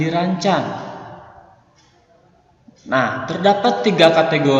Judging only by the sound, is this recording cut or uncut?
uncut